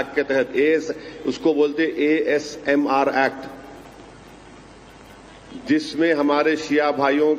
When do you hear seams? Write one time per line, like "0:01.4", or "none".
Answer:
0:04.0